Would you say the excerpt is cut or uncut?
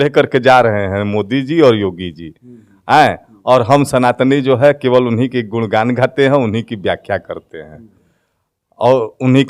uncut